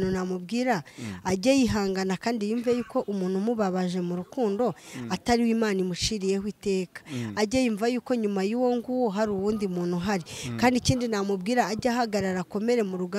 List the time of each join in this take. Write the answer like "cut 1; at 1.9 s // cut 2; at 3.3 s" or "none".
none